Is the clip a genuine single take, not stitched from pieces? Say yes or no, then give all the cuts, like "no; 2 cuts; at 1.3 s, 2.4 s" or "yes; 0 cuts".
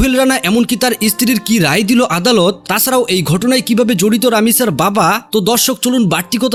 yes; 0 cuts